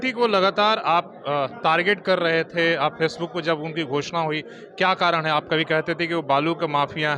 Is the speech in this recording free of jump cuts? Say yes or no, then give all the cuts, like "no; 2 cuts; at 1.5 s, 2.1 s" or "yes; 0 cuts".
yes; 0 cuts